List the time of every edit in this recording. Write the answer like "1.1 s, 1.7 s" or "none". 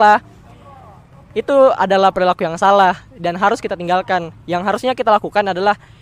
none